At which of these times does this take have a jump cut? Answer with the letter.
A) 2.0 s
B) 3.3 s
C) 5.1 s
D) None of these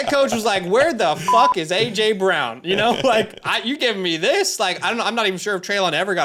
D